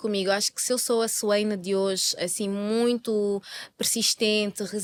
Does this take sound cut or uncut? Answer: uncut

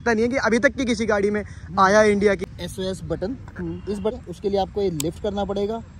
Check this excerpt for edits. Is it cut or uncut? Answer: cut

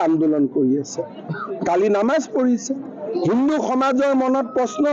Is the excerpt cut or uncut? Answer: uncut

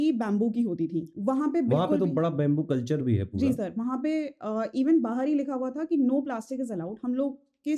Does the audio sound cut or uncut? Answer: cut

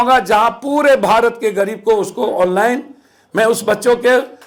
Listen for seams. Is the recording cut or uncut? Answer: uncut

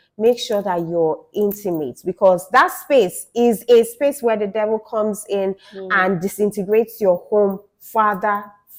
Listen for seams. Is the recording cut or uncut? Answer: uncut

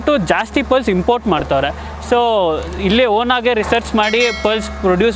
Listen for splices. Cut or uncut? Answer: uncut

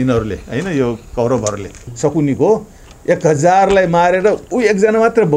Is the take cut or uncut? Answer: cut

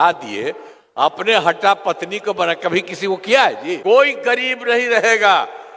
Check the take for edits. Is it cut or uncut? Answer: cut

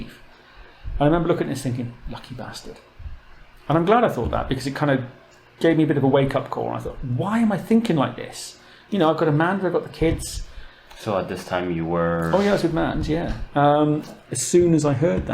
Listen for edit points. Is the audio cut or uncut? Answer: cut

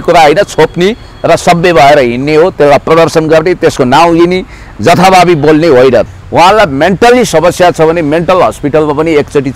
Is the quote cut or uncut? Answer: cut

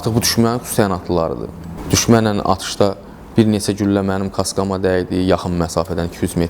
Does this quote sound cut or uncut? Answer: cut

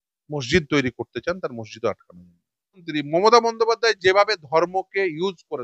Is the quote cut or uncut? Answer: cut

